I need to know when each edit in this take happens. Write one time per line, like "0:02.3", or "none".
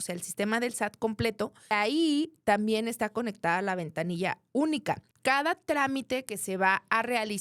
0:01.7
0:05.1